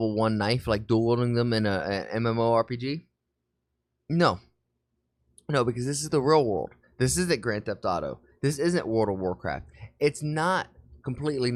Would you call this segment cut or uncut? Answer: uncut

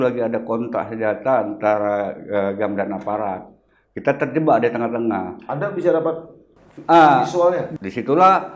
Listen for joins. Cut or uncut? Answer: cut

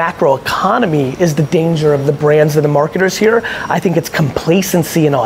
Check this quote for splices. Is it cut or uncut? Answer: uncut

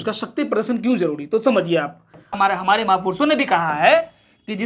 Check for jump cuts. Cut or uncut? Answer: cut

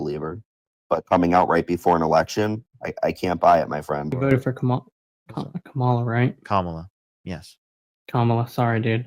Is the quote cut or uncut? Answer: cut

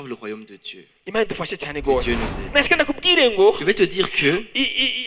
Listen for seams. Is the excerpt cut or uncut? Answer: cut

